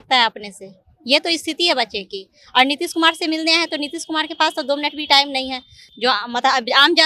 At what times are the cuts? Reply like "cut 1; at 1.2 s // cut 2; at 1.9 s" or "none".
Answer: none